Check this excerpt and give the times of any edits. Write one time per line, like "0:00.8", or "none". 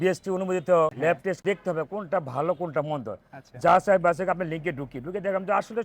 0:01.4